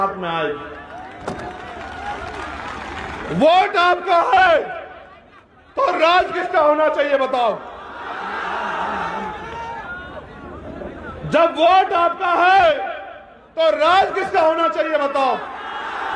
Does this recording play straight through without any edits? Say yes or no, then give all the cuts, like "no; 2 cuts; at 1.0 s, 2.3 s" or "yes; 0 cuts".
yes; 0 cuts